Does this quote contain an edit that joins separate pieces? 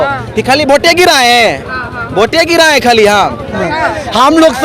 yes; 1 cut; at 3.5 s

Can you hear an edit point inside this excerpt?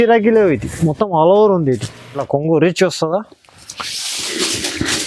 yes; 1 cut; at 2.2 s

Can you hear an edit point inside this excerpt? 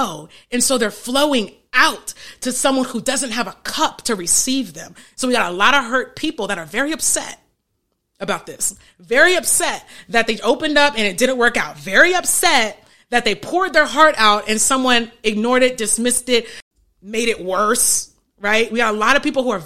yes; 1 cut; at 16.6 s

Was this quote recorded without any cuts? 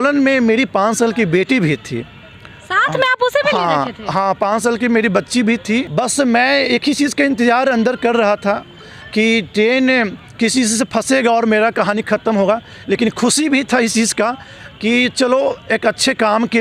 no; 1 cut; at 5.9 s

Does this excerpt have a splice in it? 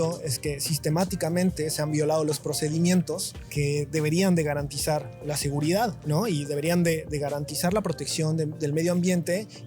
yes; 2 cuts; at 3.4 s, 6.0 s

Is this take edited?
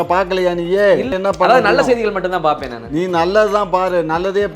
yes; 1 cut; at 1.1 s

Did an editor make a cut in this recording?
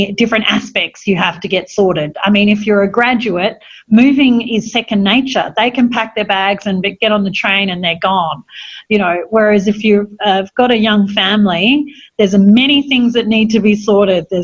no; 0 cuts

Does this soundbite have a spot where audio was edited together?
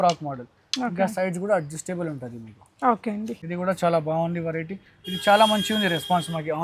yes; 1 cut; at 3.4 s

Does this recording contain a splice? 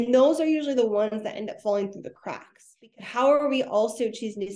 yes; 1 cut; at 2.7 s

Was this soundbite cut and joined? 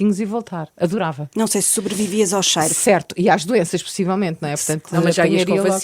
no; 0 cuts

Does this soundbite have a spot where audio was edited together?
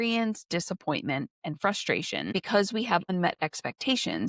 yes; 2 cuts; at 1.3 s, 2.3 s

